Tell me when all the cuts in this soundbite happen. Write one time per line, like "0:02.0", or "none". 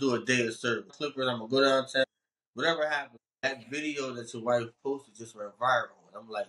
0:01.0
0:02.0
0:03.4